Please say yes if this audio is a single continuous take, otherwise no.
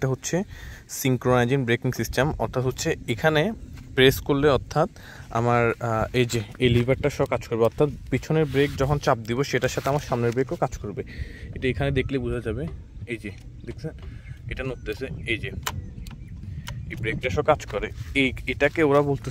yes